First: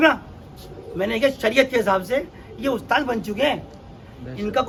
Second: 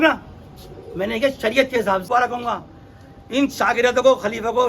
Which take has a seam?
second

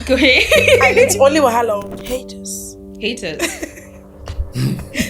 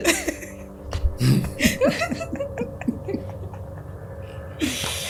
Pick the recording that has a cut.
first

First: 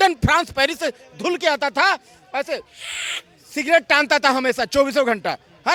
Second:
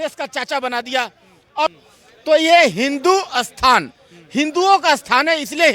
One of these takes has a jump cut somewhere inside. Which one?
second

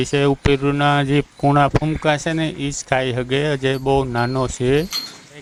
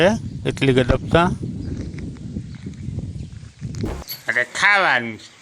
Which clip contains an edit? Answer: second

